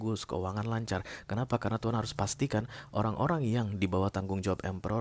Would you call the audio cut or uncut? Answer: uncut